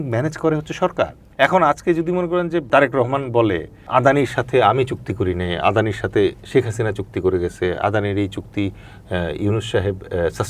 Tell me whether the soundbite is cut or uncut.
cut